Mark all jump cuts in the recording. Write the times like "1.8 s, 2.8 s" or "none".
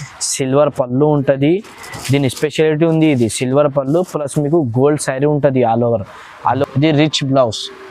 6.6 s